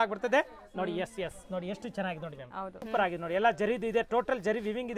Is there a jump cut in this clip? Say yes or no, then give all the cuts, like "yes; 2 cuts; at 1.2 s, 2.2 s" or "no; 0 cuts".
yes; 1 cut; at 2.8 s